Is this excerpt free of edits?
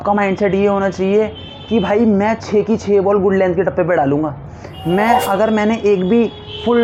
yes; 0 cuts

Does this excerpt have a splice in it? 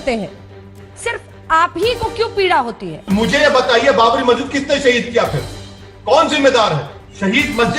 no; 0 cuts

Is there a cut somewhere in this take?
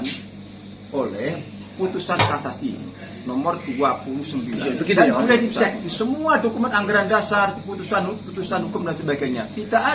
yes; 1 cut; at 4.6 s

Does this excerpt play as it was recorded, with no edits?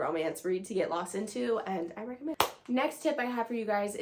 yes; 0 cuts

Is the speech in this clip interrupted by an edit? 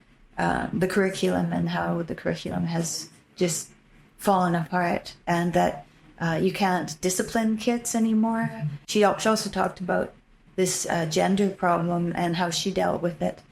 yes; 1 cut; at 8.8 s

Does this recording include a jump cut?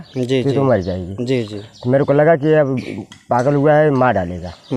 no; 0 cuts

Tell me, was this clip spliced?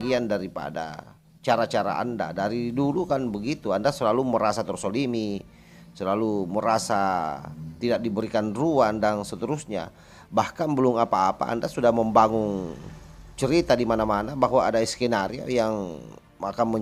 no; 0 cuts

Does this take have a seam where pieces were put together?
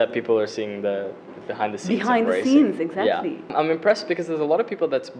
yes; 1 cut; at 3.5 s

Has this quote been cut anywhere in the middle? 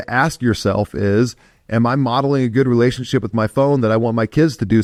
no; 0 cuts

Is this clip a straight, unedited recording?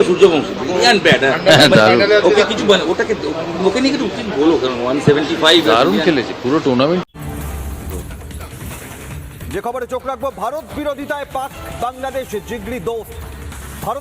no; 1 cut; at 7.3 s

